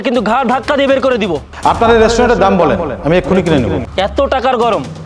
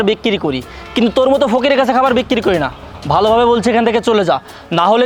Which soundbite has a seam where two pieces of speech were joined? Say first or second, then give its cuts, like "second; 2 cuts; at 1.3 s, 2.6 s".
first; 2 cuts; at 1.5 s, 3.8 s